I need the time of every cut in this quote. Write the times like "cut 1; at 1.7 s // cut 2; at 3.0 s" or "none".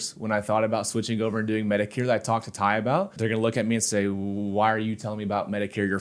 cut 1; at 3.2 s